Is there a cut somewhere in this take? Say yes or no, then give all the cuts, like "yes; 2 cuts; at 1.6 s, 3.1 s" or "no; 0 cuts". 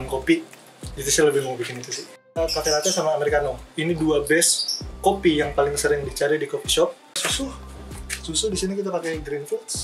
yes; 1 cut; at 7.2 s